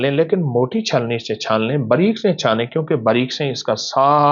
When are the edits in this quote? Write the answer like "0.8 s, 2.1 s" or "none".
none